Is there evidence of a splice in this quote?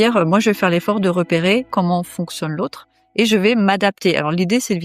yes; 1 cut; at 1.7 s

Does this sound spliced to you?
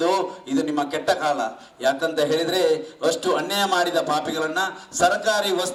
no; 0 cuts

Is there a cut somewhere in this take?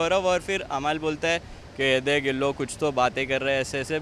no; 0 cuts

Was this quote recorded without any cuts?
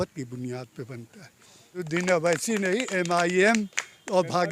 no; 1 cut; at 1.9 s

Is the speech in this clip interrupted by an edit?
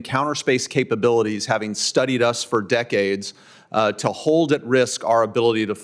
no; 0 cuts

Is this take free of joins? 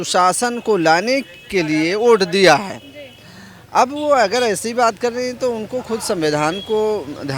yes; 0 cuts

